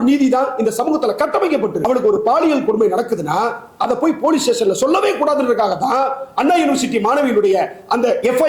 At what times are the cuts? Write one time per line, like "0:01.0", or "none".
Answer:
0:01.8